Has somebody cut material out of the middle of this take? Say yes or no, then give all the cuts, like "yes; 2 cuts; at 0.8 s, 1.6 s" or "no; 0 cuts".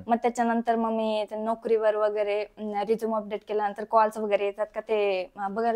no; 0 cuts